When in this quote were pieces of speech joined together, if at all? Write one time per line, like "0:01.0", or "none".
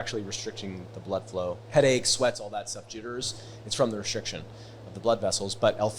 0:01.6